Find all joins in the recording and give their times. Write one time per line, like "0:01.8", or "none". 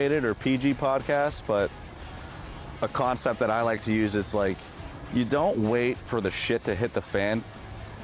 none